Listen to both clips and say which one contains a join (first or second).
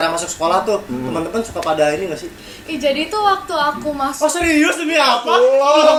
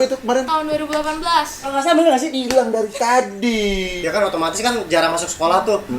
second